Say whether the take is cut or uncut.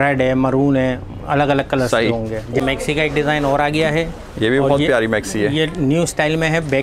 cut